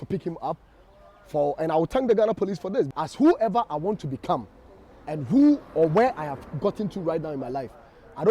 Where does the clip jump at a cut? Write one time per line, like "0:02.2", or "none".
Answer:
0:02.9